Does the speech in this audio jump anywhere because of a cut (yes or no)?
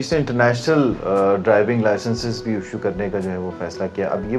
no